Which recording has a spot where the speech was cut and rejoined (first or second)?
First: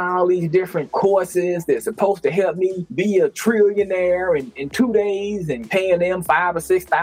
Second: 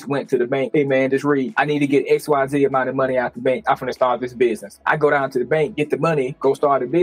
second